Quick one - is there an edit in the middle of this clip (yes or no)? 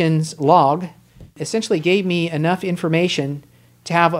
yes